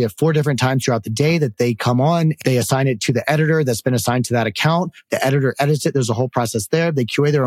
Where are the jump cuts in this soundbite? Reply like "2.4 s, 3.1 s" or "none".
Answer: 1.5 s, 2.4 s, 5.0 s